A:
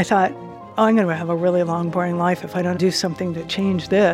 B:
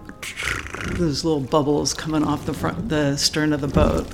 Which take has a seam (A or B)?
A